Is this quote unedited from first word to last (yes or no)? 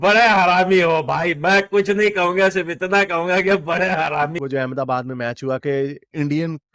no